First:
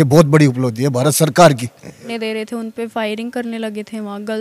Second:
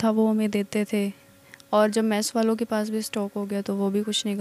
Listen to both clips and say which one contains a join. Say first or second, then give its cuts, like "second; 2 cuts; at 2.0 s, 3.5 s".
first; 1 cut; at 2.0 s